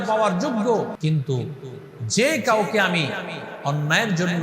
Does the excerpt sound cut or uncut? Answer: cut